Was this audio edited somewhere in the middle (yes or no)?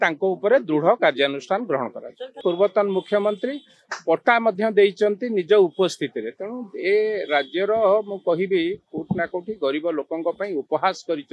yes